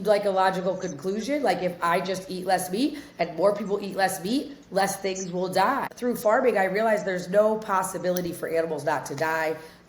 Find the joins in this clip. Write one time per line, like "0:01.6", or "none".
0:05.9